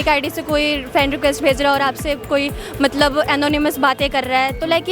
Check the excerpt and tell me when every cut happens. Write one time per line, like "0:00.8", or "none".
none